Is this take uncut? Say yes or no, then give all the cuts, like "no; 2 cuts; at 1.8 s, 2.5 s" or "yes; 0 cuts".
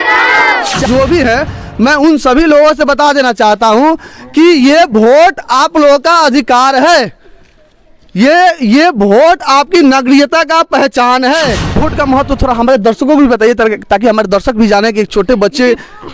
no; 2 cuts; at 0.8 s, 11.8 s